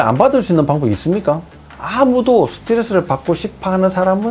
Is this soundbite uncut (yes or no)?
yes